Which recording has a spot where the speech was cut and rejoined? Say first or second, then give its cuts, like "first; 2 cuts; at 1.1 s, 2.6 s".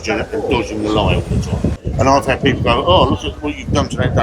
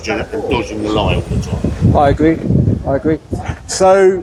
first; 1 cut; at 1.8 s